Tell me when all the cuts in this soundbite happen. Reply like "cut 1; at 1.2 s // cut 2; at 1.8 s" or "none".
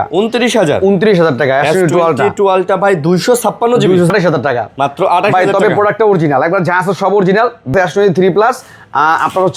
cut 1; at 4.1 s // cut 2; at 7.7 s